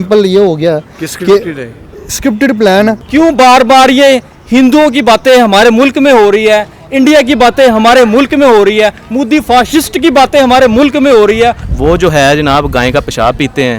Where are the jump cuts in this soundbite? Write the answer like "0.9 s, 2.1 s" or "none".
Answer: 3.0 s, 11.7 s

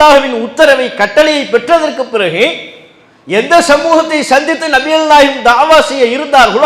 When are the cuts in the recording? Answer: none

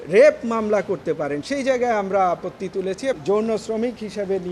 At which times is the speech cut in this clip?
3.2 s

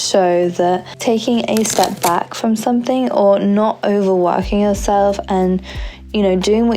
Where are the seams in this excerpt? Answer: none

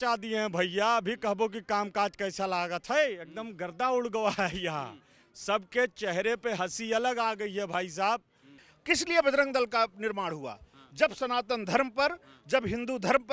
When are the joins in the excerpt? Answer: 8.7 s

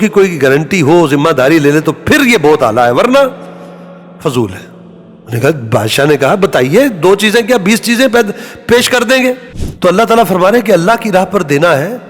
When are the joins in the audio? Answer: 9.5 s

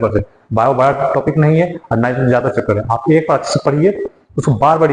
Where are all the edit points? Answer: none

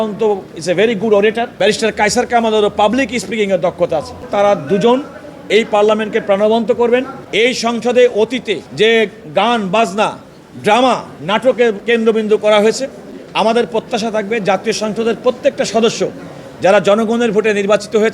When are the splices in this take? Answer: 1.3 s, 4.3 s, 7.2 s, 8.7 s, 11.8 s

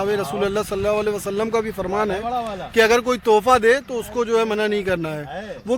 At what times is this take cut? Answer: none

